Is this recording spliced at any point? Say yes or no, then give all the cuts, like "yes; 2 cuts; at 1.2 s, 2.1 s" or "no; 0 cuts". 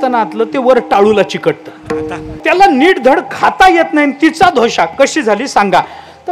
yes; 1 cut; at 2.4 s